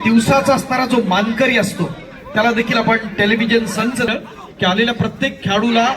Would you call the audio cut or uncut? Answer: cut